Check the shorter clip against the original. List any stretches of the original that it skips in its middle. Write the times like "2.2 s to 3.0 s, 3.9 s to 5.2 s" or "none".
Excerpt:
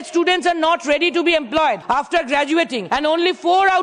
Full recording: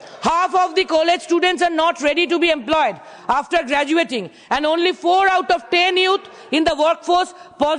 3.0 s to 3.2 s, 4.2 s to 4.4 s